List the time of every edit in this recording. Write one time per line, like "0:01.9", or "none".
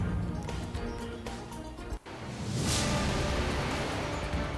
0:01.2
0:02.0